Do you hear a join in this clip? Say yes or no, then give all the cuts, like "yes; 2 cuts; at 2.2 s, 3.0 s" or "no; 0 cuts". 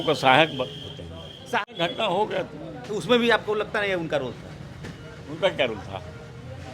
yes; 1 cut; at 1.4 s